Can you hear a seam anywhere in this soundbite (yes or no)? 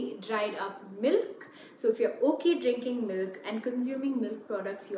no